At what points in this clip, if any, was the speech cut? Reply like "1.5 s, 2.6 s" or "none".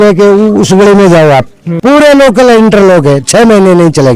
none